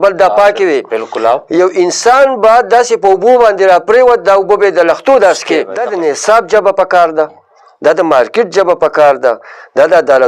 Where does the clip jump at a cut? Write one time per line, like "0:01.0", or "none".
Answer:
0:05.8